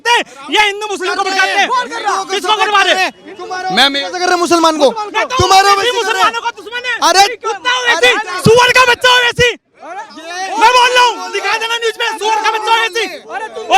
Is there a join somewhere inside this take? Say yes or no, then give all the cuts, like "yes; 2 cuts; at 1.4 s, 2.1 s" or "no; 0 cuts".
no; 0 cuts